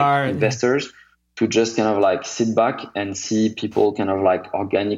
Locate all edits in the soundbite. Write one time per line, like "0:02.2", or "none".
none